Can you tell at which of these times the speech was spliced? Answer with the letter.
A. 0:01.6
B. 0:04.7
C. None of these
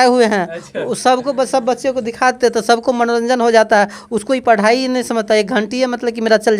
C